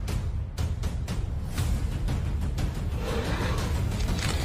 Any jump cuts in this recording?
no; 0 cuts

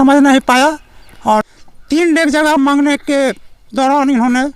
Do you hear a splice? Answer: yes; 1 cut; at 1.4 s

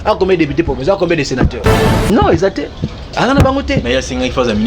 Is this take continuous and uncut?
no; 1 cut; at 2.1 s

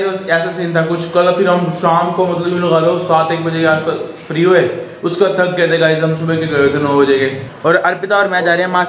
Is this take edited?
yes; 1 cut; at 7.5 s

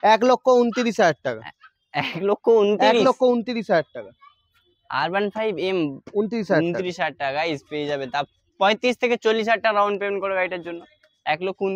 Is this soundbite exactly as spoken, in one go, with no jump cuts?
yes; 0 cuts

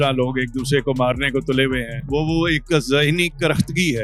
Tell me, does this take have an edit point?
no; 0 cuts

